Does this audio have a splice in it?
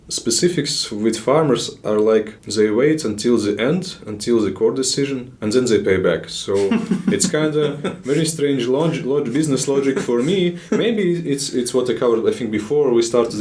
yes; 2 cuts; at 2.4 s, 5.3 s

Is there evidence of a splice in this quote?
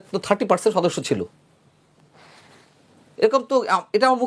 no; 0 cuts

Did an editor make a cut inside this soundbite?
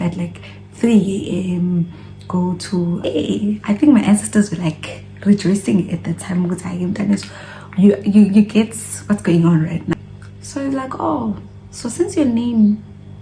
yes; 2 cuts; at 3.0 s, 9.9 s

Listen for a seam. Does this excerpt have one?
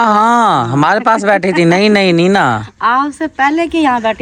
no; 0 cuts

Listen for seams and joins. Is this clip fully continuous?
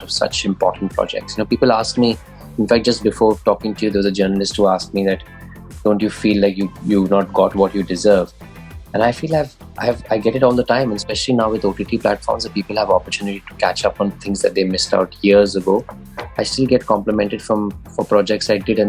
yes; 0 cuts

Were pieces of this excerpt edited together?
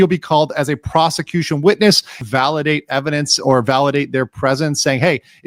yes; 1 cut; at 2.2 s

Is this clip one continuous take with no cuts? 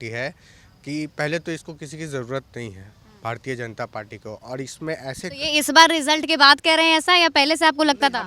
yes; 0 cuts

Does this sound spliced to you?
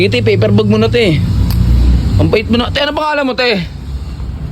no; 0 cuts

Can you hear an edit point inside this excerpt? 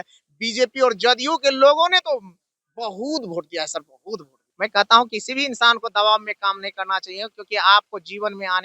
yes; 1 cut; at 4.4 s

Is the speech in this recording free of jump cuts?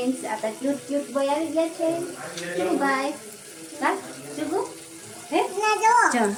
yes; 0 cuts

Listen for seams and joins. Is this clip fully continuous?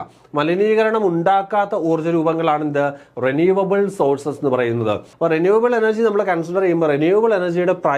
no; 1 cut; at 5.1 s

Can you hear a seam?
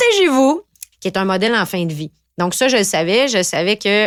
no; 0 cuts

